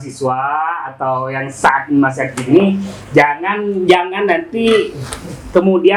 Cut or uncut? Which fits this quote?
uncut